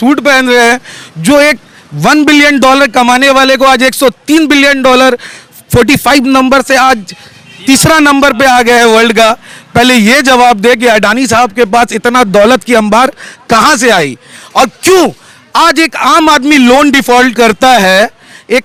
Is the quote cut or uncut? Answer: uncut